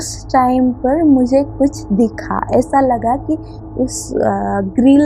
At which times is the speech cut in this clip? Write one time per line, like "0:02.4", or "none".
none

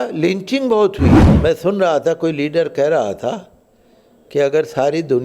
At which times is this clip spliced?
0:01.3

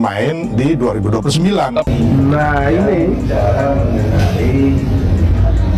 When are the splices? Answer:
0:01.9

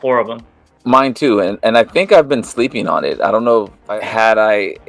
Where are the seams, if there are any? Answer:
0:03.8

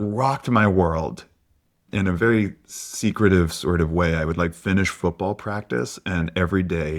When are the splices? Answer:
0:01.9

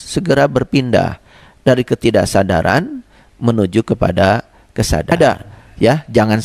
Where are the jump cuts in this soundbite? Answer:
0:05.1

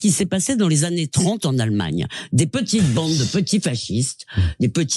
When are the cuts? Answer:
none

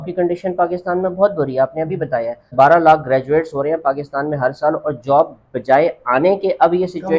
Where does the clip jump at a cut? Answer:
0:02.5

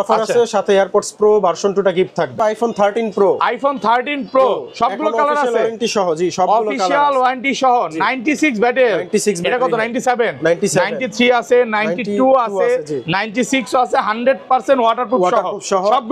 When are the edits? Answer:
0:02.3

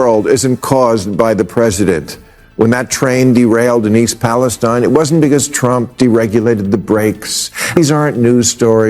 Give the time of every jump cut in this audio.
0:07.8

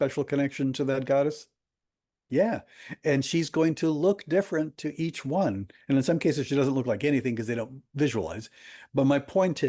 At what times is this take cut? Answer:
none

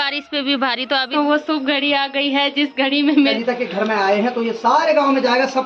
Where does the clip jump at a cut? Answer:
0:01.1
0:03.4

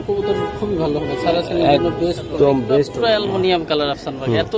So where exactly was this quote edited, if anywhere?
0:02.9

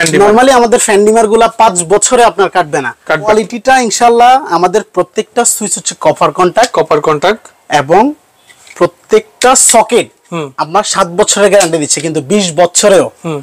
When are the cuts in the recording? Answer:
0:03.3

